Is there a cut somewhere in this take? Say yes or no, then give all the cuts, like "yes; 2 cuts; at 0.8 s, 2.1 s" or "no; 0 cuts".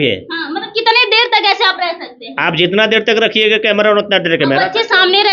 no; 0 cuts